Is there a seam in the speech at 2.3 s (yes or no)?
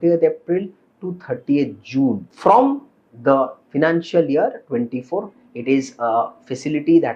yes